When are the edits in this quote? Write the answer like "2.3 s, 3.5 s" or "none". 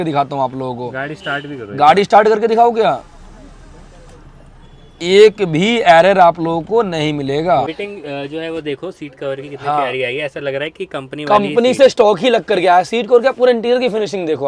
7.7 s